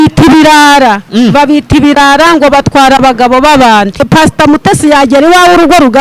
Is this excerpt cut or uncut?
cut